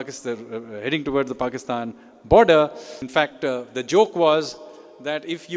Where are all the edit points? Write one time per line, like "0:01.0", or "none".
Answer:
0:03.0